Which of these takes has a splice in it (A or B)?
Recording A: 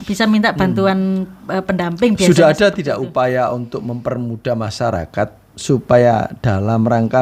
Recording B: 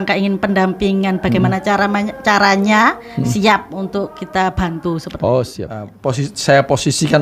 B